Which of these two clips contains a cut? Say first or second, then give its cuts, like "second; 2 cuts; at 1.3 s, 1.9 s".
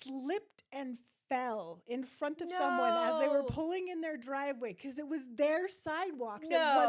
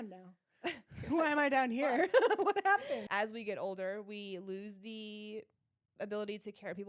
second; 1 cut; at 3.1 s